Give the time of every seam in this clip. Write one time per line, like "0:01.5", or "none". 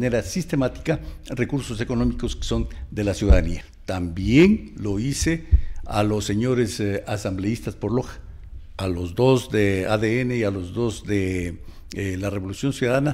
0:03.7